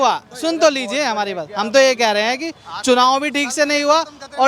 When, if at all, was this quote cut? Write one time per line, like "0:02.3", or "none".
none